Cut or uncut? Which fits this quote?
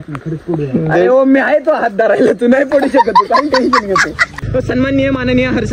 cut